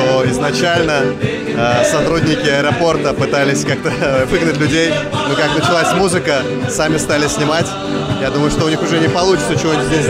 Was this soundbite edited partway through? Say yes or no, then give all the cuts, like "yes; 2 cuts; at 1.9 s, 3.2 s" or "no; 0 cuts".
no; 0 cuts